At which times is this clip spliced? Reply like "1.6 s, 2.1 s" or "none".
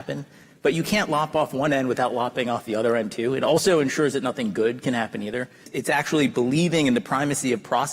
5.6 s